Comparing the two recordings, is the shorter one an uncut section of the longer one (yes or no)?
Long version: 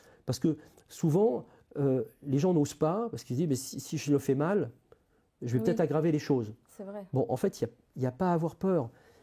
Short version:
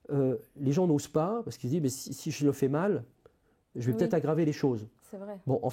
yes